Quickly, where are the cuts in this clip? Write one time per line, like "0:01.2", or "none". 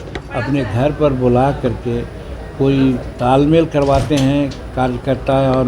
none